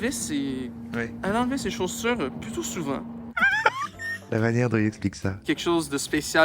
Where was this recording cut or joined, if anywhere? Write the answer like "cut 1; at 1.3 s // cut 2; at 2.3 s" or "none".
cut 1; at 1.1 s // cut 2; at 3.6 s // cut 3; at 5.4 s